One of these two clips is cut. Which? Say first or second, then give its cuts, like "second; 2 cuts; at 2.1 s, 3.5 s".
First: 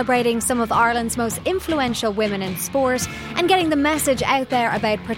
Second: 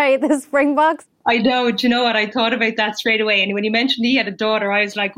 second; 1 cut; at 1.0 s